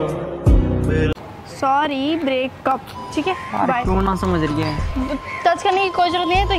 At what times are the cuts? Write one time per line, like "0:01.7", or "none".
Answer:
0:01.1